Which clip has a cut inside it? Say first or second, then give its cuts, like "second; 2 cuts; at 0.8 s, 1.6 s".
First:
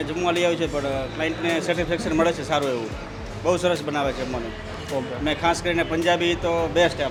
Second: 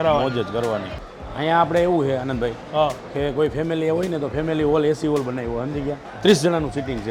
second; 2 cuts; at 0.9 s, 6.0 s